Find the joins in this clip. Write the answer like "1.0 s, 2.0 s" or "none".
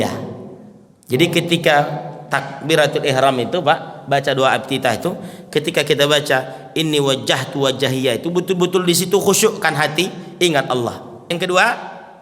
11.3 s